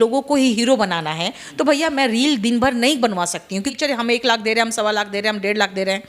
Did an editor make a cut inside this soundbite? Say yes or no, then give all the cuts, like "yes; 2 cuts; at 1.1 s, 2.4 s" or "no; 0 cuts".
yes; 1 cut; at 3.7 s